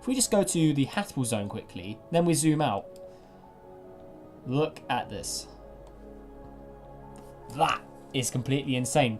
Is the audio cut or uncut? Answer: cut